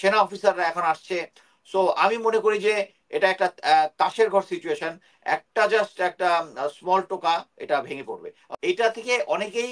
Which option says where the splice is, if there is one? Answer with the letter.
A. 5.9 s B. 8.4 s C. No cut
B